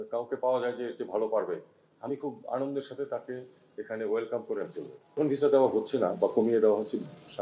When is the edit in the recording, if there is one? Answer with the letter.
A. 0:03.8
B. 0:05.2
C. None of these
B